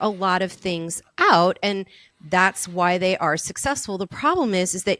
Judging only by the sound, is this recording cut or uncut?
uncut